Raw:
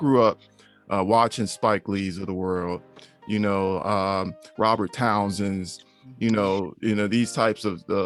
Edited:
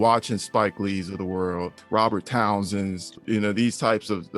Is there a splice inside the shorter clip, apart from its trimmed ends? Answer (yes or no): yes